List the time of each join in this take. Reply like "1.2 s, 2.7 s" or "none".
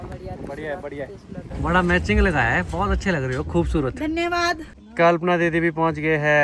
1.5 s, 4.7 s